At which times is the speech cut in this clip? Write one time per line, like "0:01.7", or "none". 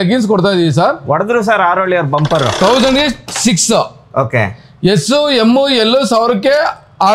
0:02.5